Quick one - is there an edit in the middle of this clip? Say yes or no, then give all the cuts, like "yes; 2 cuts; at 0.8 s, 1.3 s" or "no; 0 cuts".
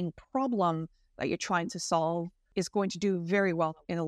yes; 1 cut; at 2.4 s